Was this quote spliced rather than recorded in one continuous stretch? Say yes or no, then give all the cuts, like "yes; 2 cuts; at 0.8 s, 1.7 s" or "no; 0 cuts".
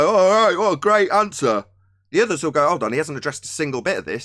no; 0 cuts